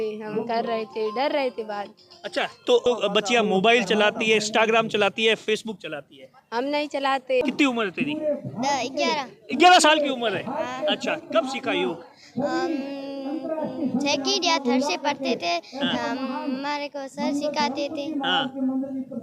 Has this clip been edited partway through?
yes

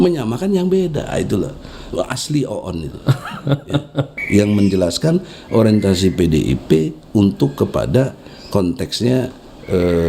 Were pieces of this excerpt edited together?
yes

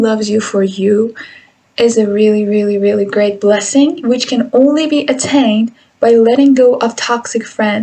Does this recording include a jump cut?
no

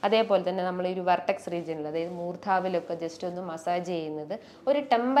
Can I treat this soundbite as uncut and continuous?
yes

